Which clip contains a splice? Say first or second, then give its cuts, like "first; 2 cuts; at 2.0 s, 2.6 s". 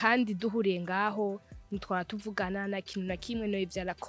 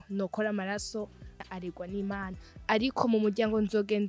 second; 1 cut; at 1.5 s